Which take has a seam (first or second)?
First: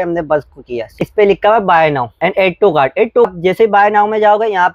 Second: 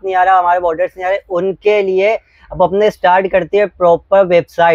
first